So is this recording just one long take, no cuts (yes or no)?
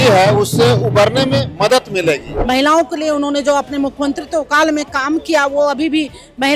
no